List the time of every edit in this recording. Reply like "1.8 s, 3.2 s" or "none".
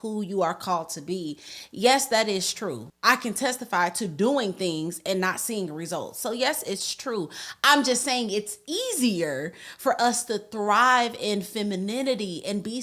2.9 s